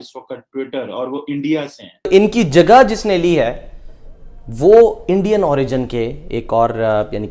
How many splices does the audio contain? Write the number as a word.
one